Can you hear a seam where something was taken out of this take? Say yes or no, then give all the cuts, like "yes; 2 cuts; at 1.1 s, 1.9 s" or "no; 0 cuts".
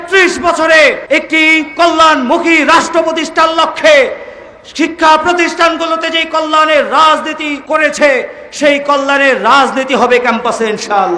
yes; 2 cuts; at 1.0 s, 7.5 s